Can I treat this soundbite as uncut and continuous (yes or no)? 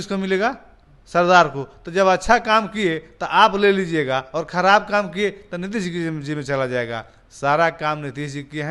yes